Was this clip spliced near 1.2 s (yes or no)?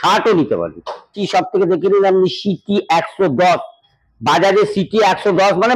yes